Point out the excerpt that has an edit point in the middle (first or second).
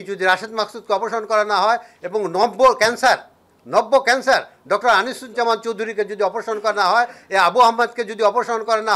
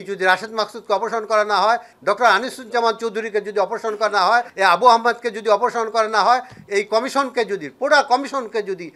second